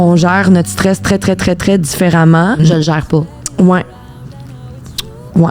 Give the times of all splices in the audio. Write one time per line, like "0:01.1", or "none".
0:02.6